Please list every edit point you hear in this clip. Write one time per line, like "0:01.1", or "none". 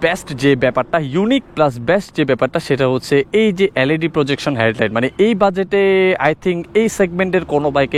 none